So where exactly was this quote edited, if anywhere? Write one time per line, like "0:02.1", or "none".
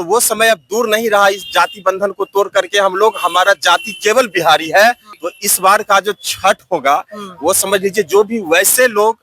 0:05.1